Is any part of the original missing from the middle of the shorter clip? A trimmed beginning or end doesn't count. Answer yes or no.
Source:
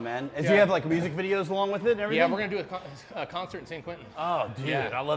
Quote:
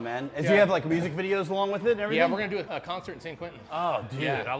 yes